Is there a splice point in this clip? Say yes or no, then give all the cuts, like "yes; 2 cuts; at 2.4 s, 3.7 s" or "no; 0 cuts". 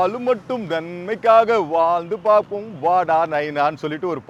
no; 0 cuts